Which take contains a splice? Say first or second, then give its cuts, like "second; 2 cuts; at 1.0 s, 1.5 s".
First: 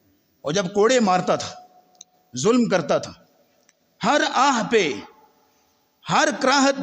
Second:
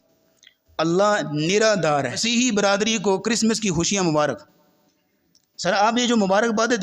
second; 1 cut; at 2.2 s